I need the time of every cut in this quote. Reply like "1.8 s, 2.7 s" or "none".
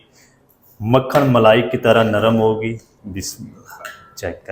2.9 s